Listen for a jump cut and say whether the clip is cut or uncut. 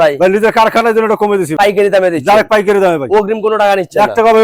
cut